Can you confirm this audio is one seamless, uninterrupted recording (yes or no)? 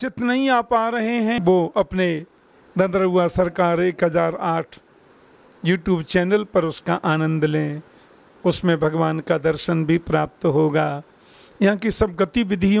no